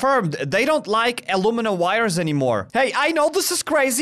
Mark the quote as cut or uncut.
cut